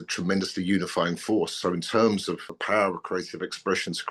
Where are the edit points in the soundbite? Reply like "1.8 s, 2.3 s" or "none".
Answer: 2.5 s